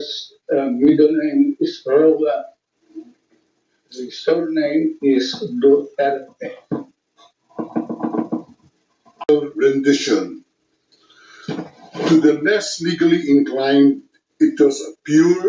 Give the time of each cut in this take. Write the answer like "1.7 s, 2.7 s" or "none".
9.3 s